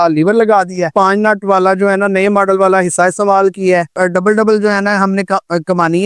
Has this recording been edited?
yes; 2 cuts; at 0.9 s, 4.0 s

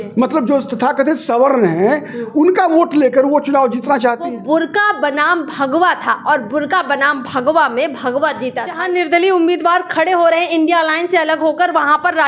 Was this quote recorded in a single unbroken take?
no; 2 cuts; at 4.3 s, 8.8 s

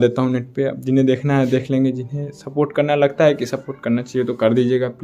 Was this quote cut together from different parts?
no; 0 cuts

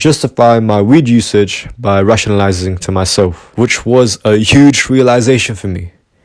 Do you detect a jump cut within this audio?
yes; 1 cut; at 3.4 s

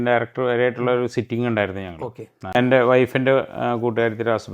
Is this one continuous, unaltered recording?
no; 1 cut; at 2.4 s

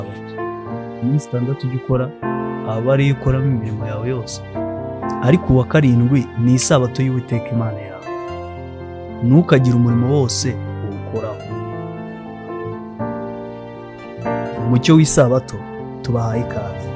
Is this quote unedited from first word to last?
yes; 0 cuts

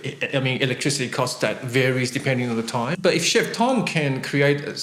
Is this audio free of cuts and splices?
yes; 0 cuts

